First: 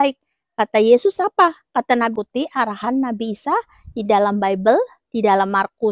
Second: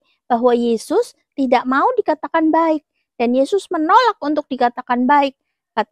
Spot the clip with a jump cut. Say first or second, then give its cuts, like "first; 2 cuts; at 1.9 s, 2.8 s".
first; 1 cut; at 2.1 s